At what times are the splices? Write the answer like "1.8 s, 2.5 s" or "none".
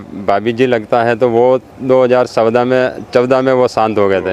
none

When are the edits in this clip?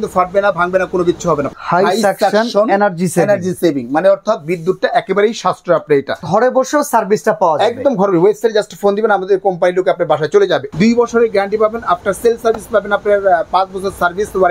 1.5 s, 6.2 s, 10.7 s

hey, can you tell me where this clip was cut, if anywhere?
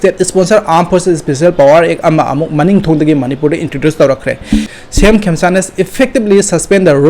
4.7 s

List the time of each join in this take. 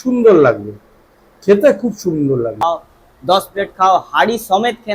2.6 s

